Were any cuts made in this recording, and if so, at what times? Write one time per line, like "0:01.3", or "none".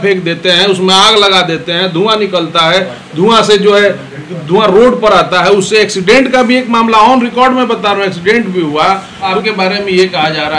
0:09.3

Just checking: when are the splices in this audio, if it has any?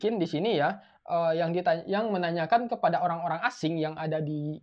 none

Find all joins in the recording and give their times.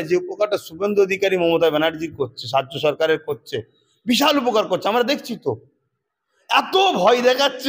none

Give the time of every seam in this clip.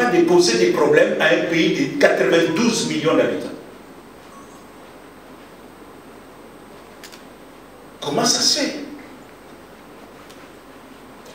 none

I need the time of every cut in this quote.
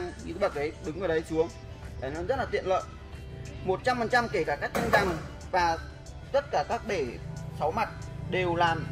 none

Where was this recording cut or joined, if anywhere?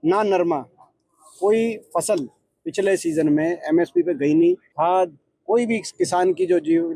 0:04.7

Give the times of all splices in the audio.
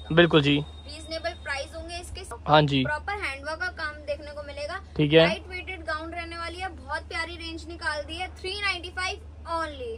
0:02.4

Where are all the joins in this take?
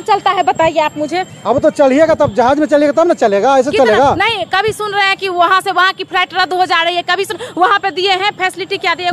none

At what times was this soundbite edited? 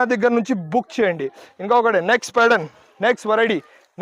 none

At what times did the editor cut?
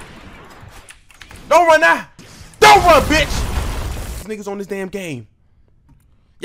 0:04.2

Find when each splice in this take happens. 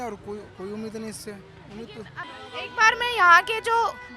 0:02.2

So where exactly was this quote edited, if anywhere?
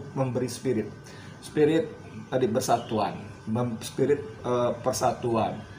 none

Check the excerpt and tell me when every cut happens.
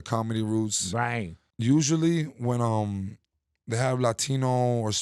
0:01.4

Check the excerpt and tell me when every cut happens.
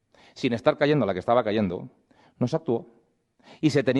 0:03.0

